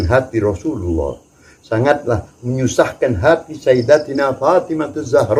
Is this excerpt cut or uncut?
uncut